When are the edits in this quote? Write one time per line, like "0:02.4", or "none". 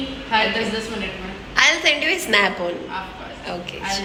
none